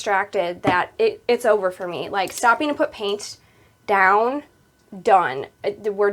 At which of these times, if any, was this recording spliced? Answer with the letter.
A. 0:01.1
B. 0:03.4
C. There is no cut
C